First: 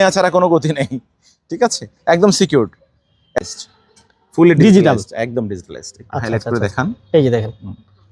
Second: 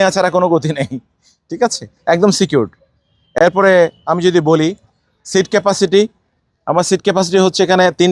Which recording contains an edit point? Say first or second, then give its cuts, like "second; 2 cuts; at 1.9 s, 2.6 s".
first; 1 cut; at 3.4 s